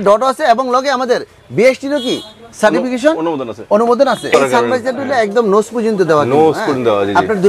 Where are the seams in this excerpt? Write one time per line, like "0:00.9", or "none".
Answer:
0:04.3